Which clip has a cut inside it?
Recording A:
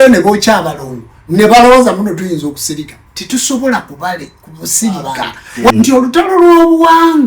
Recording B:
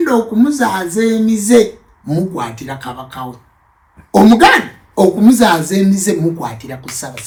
A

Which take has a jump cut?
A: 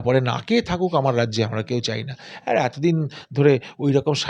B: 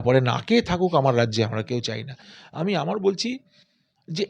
B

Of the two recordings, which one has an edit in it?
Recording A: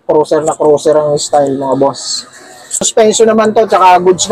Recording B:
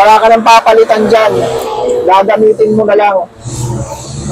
A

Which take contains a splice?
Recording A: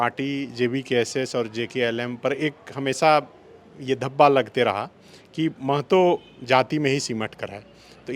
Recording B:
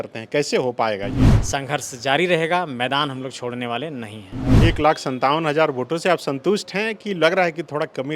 B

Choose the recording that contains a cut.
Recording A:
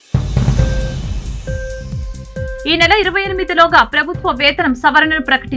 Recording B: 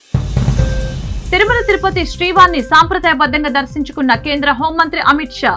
A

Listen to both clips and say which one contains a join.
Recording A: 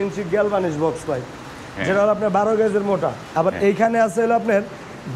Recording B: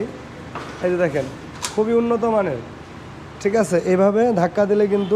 A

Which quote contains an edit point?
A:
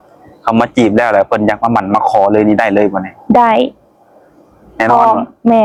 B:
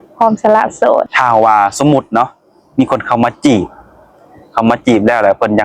B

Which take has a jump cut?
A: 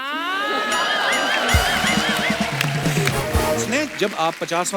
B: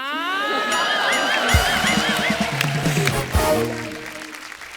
A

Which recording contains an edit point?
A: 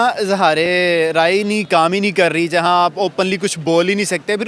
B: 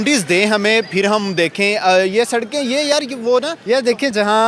B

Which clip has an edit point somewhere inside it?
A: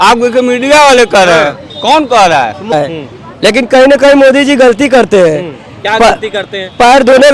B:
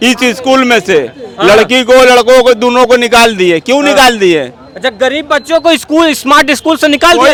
A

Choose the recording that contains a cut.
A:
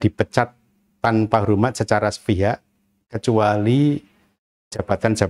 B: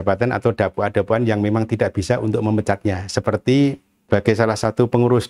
B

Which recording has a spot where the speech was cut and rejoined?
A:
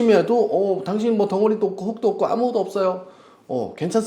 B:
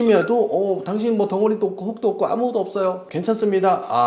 B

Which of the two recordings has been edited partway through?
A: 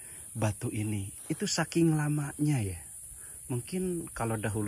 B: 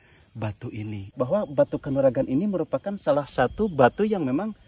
B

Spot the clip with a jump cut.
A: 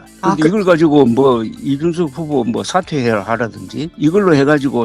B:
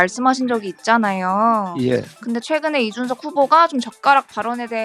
A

